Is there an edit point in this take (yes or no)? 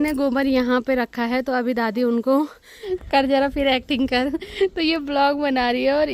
yes